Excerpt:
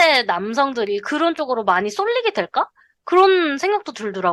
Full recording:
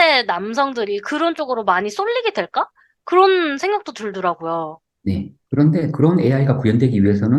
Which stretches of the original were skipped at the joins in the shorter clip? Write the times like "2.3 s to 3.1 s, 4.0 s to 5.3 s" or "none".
none

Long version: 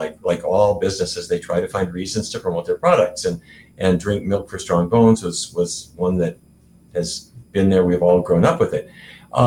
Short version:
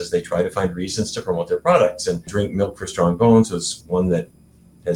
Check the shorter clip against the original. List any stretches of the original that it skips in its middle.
3.5 s to 4.0 s, 5.4 s to 5.8 s

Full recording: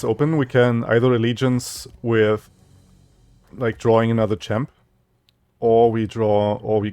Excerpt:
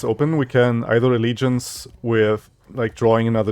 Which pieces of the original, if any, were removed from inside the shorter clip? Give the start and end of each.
2.6 s to 3.4 s

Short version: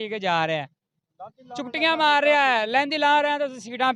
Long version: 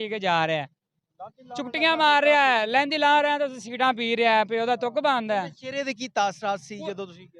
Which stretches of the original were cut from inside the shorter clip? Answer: none

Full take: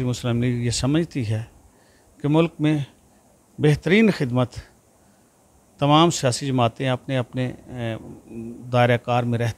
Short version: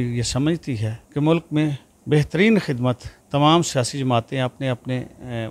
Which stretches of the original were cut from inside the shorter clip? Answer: 1.4 s to 2.0 s, 3.0 s to 3.4 s, 4.6 s to 5.6 s

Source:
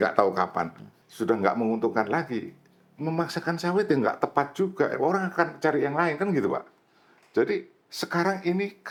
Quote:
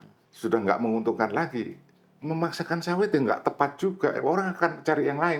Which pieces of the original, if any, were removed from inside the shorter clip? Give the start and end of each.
none

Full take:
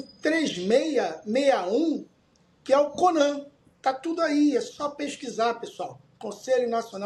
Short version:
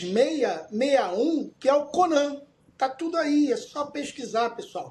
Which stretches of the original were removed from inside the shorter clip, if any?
2.1 s to 2.6 s

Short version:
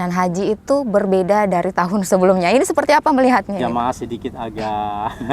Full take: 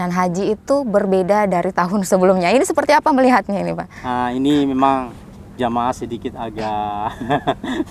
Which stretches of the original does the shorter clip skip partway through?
3.6 s to 5.6 s

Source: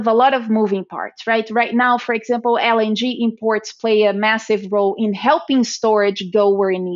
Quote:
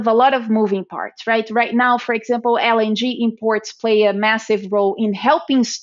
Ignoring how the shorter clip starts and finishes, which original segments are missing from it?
none

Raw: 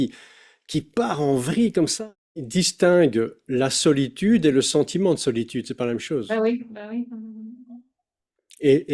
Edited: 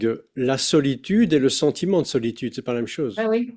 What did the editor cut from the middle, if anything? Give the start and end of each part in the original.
none

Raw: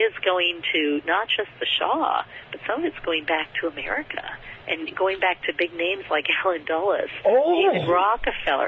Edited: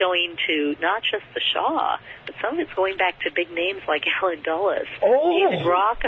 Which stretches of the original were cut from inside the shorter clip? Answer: 2.9 s to 4.9 s

